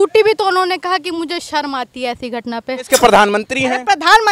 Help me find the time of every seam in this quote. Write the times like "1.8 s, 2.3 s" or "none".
2.9 s